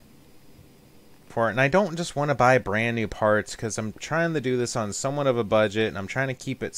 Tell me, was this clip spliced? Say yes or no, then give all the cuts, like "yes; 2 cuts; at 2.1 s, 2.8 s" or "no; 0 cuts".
yes; 1 cut; at 1.2 s